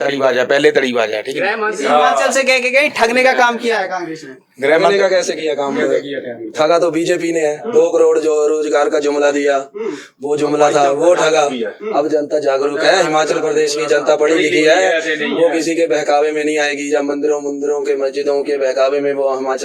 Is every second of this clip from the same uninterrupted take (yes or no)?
yes